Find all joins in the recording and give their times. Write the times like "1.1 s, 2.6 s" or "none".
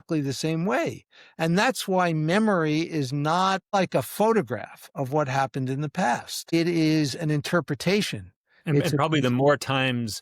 3.7 s, 6.5 s